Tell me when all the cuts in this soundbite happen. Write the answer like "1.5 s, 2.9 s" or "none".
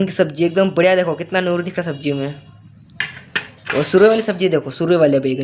none